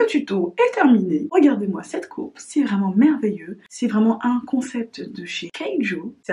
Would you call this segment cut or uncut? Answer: uncut